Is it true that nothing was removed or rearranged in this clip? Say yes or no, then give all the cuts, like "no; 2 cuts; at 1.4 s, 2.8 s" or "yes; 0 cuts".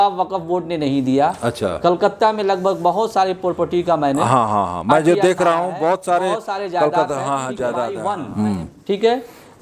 no; 1 cut; at 8.0 s